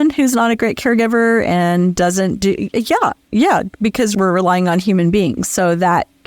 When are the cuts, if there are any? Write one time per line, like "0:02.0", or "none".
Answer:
0:03.2